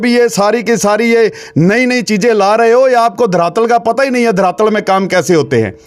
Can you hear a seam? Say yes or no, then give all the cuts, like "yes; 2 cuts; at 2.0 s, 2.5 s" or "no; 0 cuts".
no; 0 cuts